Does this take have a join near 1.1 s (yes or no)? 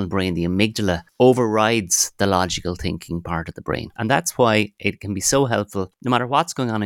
yes